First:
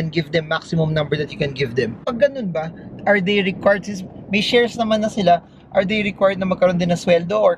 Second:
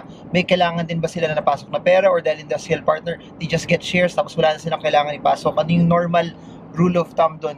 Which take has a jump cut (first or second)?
first